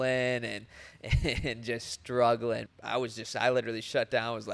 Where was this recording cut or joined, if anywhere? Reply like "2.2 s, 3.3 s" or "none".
2.7 s

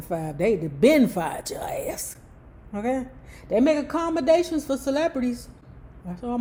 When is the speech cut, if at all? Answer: none

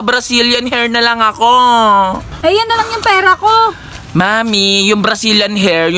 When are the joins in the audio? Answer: 2.3 s

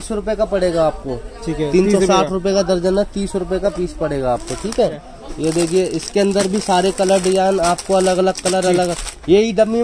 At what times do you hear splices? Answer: 4.9 s

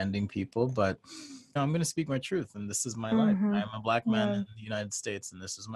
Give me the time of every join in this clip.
1.6 s

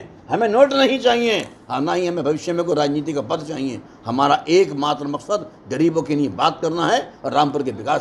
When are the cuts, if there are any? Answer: none

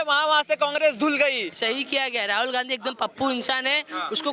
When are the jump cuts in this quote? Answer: 1.5 s

